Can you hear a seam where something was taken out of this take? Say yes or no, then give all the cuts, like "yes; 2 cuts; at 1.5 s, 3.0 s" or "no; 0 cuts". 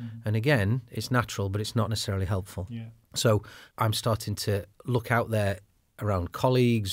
yes; 2 cuts; at 2.6 s, 3.6 s